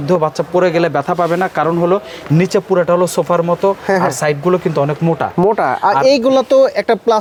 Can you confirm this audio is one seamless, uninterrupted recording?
yes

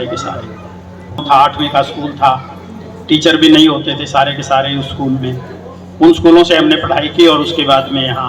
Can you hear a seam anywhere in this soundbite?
yes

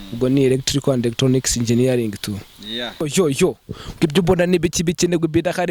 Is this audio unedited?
no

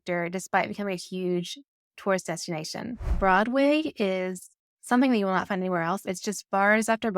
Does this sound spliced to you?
yes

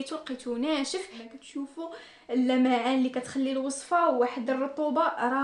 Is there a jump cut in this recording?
yes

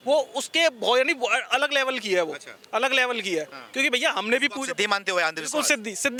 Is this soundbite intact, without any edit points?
yes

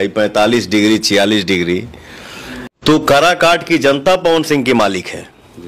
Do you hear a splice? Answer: yes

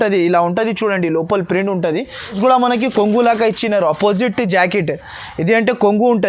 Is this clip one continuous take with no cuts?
no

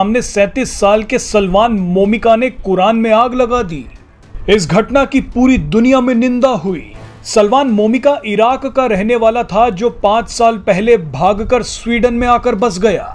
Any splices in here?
no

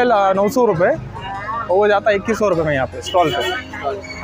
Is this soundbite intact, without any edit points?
yes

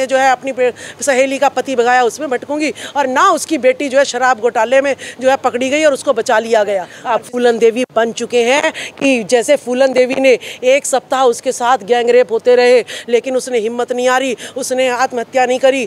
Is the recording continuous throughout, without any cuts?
no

